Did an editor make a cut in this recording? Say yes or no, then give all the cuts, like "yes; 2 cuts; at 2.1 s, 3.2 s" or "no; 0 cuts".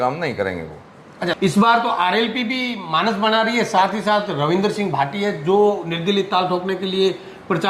yes; 1 cut; at 1.4 s